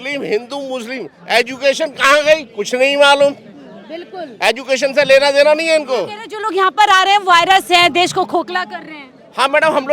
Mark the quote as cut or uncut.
uncut